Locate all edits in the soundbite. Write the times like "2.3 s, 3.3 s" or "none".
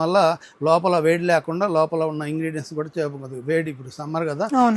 none